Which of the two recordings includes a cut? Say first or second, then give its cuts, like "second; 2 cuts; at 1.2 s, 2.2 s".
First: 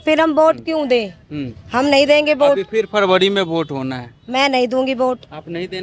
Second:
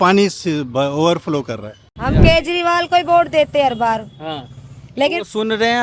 second; 1 cut; at 1.9 s